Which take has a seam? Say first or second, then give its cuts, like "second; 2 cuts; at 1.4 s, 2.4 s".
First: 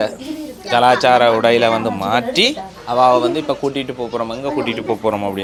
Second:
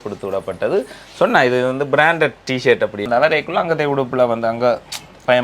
second; 1 cut; at 3.1 s